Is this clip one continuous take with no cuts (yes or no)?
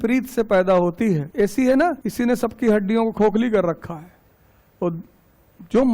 no